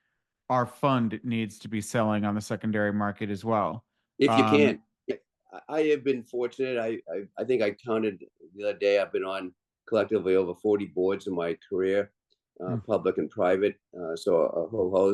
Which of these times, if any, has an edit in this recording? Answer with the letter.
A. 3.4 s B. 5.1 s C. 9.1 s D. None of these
B